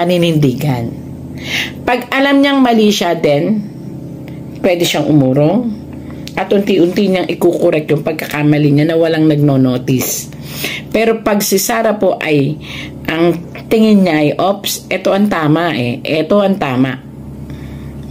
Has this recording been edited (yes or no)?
no